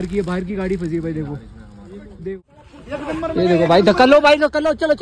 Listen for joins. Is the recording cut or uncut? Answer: cut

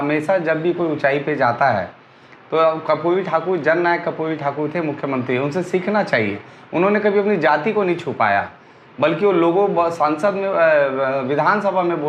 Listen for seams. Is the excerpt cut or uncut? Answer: uncut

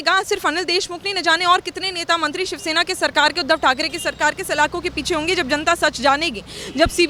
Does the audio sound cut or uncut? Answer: uncut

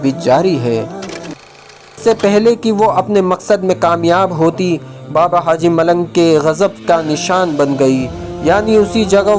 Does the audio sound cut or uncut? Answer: cut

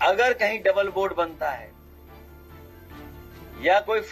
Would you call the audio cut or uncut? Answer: uncut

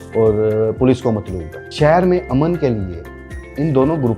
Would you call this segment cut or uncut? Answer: cut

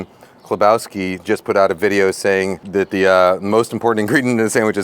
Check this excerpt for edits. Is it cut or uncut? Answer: cut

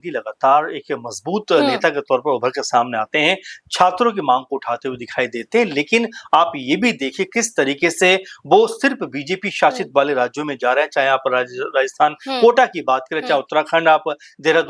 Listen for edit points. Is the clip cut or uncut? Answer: uncut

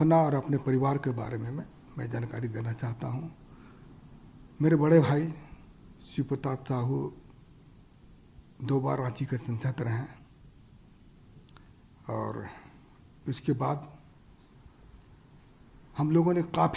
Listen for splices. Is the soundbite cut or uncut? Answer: uncut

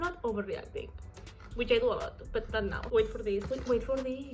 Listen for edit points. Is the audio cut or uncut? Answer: cut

